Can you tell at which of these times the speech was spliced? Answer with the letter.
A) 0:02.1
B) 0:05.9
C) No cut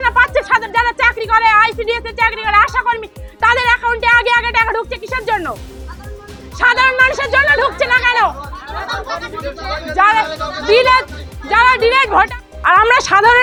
C